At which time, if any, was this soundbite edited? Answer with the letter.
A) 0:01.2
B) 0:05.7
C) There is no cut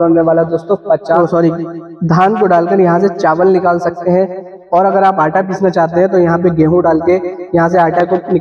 A